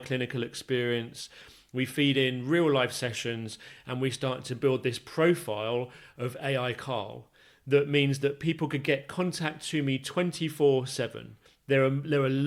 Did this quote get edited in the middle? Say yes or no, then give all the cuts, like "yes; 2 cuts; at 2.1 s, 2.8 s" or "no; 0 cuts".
no; 0 cuts